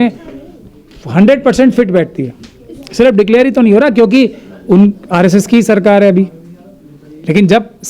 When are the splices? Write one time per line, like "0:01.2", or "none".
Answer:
none